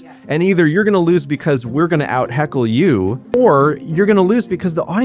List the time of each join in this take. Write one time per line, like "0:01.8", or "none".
0:03.3